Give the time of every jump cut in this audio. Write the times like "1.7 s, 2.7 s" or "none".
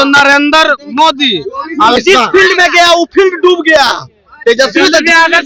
2.0 s